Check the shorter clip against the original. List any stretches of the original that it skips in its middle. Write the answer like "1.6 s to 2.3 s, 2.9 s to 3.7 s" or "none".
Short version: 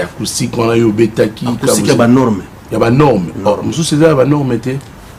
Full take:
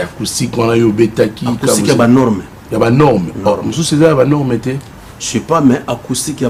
none